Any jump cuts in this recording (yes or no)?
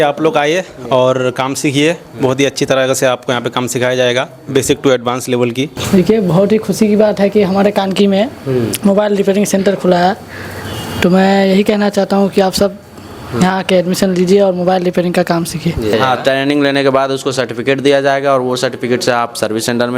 yes